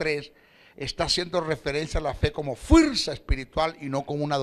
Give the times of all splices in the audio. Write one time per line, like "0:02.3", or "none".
none